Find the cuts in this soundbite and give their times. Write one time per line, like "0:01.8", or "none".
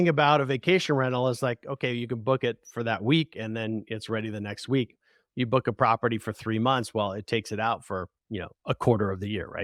none